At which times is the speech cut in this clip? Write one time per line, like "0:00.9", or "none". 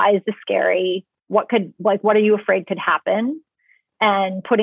none